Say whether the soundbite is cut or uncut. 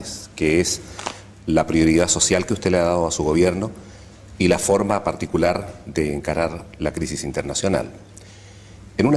uncut